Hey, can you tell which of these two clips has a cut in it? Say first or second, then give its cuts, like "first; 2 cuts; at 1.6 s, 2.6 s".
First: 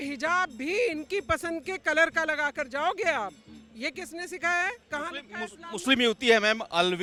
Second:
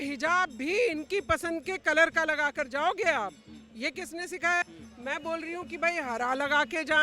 second; 1 cut; at 4.8 s